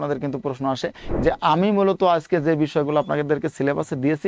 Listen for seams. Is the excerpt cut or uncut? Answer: cut